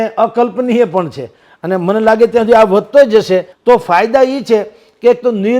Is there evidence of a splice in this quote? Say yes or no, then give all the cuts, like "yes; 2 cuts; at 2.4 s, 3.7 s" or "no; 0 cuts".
yes; 1 cut; at 3.5 s